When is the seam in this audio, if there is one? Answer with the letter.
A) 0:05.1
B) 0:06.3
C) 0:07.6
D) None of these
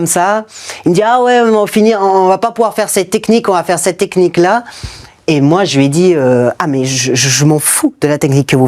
D